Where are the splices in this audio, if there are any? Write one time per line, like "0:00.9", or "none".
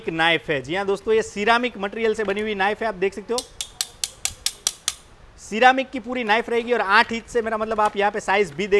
none